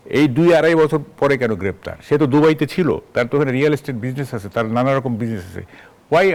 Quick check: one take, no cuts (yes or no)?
yes